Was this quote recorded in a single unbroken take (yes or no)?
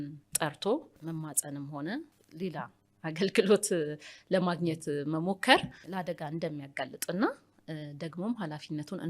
no